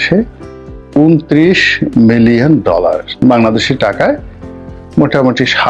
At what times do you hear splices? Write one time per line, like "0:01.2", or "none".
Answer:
0:03.0